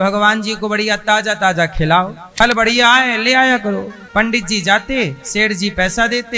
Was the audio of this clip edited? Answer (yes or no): yes